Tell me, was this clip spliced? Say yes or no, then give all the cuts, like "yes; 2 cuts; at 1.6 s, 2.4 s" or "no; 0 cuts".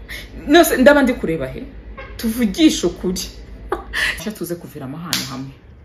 yes; 1 cut; at 4.2 s